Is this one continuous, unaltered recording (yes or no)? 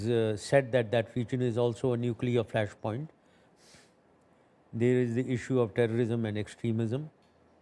no